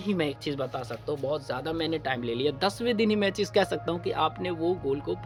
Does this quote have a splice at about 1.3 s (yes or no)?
no